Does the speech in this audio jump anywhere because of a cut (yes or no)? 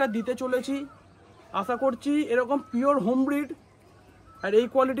no